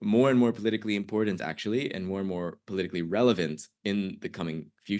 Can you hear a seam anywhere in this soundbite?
no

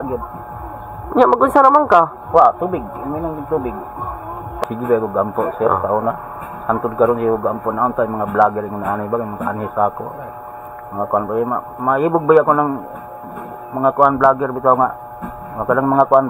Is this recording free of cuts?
no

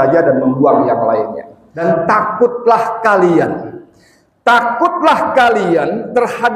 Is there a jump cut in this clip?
yes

